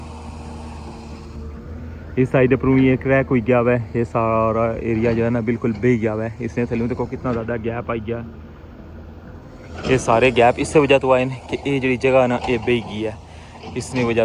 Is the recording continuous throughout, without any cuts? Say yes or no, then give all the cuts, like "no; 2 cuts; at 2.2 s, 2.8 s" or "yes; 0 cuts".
yes; 0 cuts